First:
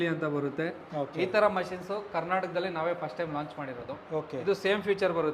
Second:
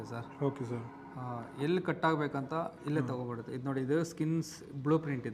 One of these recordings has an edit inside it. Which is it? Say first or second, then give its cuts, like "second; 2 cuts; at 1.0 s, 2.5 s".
first; 2 cuts; at 0.8 s, 4.4 s